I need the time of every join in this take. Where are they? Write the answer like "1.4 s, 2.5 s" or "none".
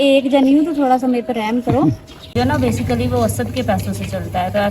2.3 s